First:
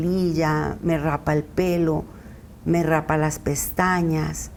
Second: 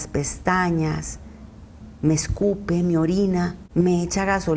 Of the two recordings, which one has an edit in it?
second; 1 cut; at 3.6 s

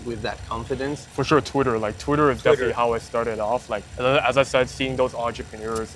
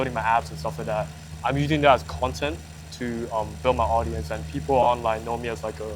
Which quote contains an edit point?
first; 2 cuts; at 1.1 s, 3.8 s

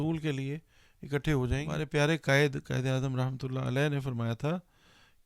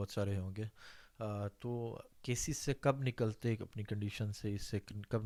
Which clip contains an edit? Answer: first; 1 cut; at 1.7 s

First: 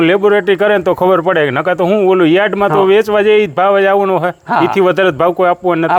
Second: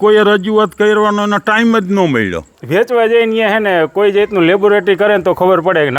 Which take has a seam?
second; 1 cut; at 2.4 s

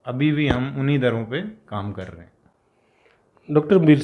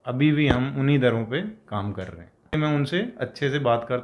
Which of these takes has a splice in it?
second; 1 cut; at 2.5 s

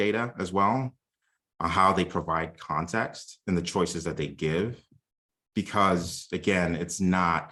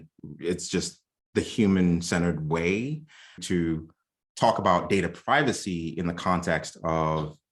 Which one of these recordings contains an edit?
second; 1 cut; at 3.4 s

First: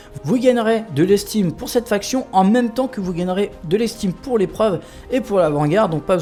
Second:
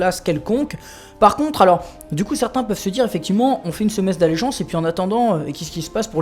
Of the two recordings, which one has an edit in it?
second; 1 cut; at 3.7 s

